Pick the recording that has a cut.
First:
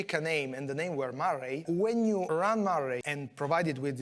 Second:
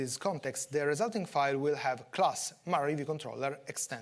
first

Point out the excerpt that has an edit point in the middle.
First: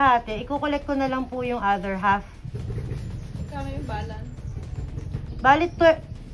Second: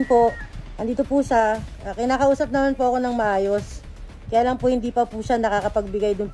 first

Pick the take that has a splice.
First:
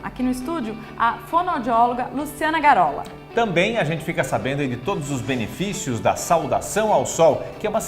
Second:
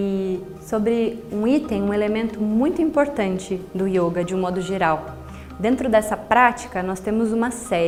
first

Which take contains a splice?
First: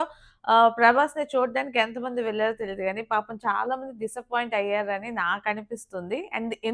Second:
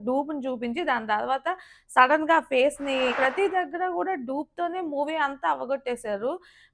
second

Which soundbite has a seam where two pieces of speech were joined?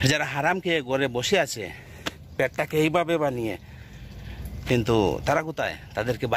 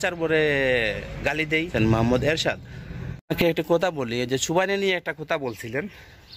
second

